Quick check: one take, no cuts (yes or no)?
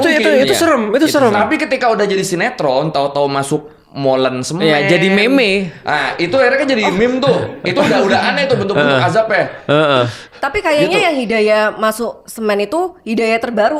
yes